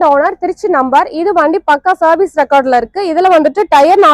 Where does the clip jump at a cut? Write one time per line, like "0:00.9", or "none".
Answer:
none

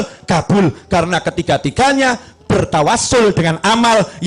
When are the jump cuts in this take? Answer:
none

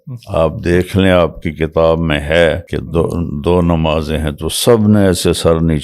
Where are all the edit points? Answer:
0:02.7

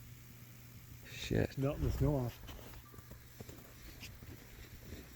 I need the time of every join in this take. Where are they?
0:01.5

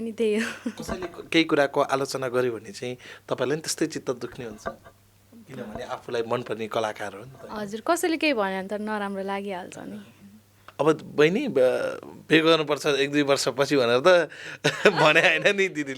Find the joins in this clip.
0:10.6

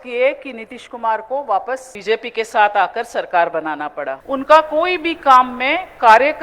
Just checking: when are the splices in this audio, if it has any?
0:01.9
0:04.2

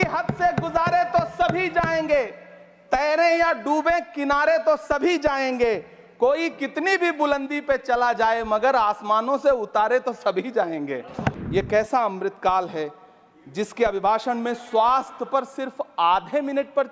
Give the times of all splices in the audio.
0:11.4

